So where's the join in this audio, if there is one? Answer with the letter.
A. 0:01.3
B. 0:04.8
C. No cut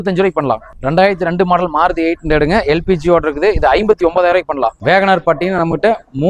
B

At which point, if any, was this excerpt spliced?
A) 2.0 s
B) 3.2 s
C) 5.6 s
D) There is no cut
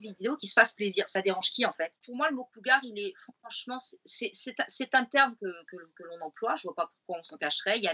A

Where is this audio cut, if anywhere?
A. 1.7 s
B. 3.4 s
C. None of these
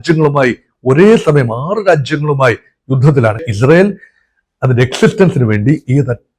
B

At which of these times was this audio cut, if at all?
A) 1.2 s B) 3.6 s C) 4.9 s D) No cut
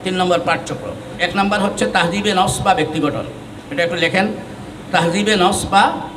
A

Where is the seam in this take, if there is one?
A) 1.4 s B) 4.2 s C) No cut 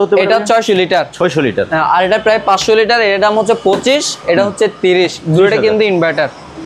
C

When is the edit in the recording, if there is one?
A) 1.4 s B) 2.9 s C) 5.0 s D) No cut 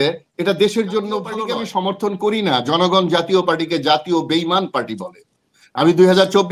A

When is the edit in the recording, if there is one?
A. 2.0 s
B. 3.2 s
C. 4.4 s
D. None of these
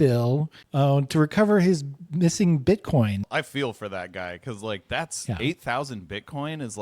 B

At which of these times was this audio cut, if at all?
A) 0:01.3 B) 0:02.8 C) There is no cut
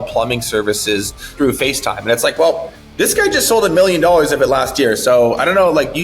A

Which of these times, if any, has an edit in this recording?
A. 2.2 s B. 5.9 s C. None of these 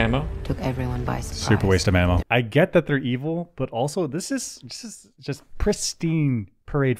A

